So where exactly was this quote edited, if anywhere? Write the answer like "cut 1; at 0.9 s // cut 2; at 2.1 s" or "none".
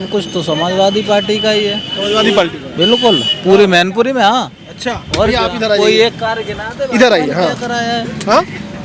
none